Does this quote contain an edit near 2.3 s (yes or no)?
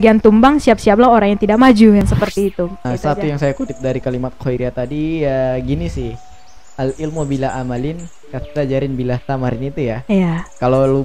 yes